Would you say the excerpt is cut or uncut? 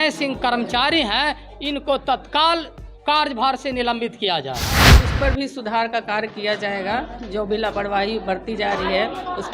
cut